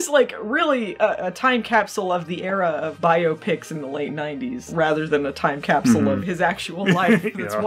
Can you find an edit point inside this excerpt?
no; 0 cuts

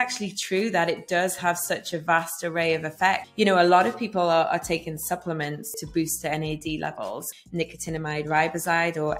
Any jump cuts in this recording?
yes; 3 cuts; at 3.3 s, 5.8 s, 7.3 s

